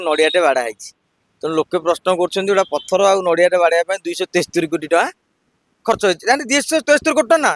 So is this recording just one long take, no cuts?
yes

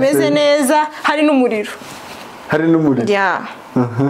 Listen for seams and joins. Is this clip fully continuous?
yes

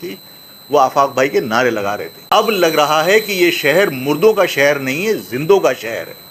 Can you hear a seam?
yes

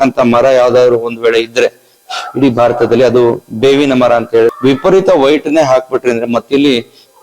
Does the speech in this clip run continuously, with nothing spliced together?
no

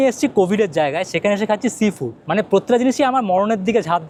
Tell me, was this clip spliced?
no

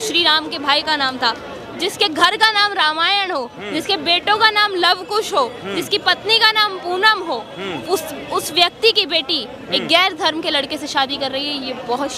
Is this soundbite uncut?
yes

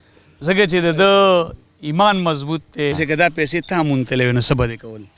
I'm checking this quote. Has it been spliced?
yes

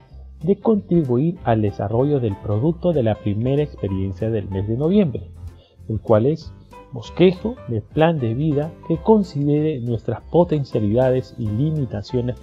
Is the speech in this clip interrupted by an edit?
no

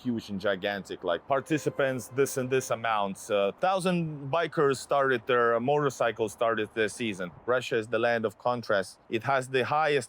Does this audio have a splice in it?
yes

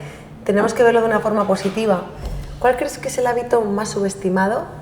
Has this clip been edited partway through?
yes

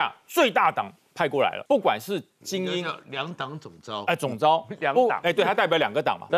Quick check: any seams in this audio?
yes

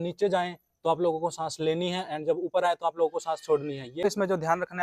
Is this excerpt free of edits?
no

